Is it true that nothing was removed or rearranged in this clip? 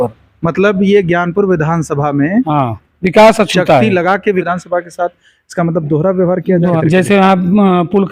no; 2 cuts; at 4.5 s, 6.8 s

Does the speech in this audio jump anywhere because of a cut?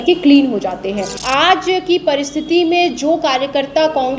yes; 1 cut; at 1.2 s

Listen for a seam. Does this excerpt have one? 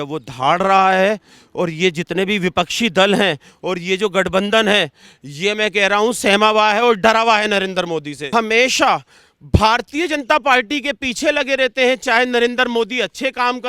yes; 1 cut; at 8.2 s

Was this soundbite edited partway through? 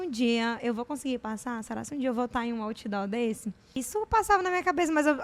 yes; 1 cut; at 3.8 s

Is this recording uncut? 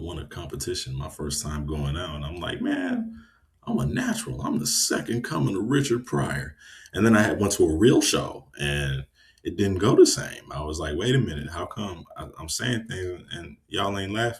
yes; 0 cuts

